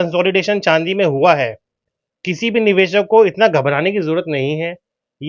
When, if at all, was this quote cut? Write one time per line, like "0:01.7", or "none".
none